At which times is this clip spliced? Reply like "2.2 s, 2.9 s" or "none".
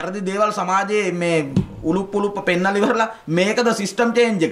none